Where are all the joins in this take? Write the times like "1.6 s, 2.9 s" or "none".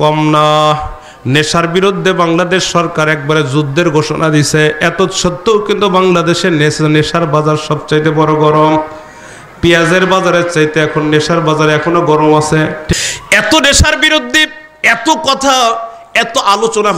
12.9 s